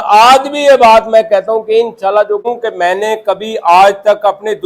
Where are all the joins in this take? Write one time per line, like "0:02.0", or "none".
0:02.5